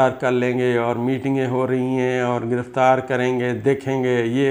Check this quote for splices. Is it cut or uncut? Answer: uncut